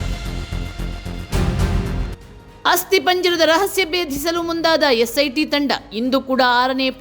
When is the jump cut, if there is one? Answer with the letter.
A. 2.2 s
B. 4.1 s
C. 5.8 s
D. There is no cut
A